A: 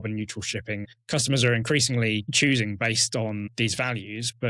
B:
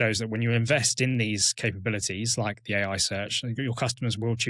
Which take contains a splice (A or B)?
A